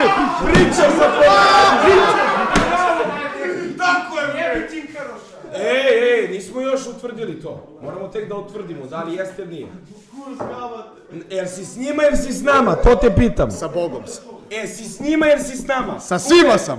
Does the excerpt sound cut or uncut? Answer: uncut